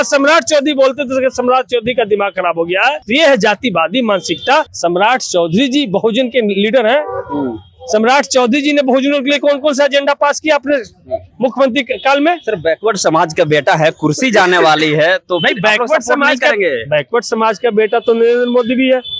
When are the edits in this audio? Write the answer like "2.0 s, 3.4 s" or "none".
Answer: 3.0 s, 4.7 s